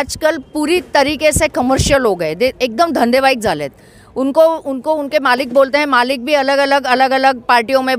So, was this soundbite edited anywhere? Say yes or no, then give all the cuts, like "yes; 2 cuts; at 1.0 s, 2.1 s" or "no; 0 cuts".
no; 0 cuts